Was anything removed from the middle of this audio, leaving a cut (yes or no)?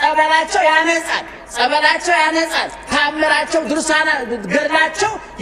no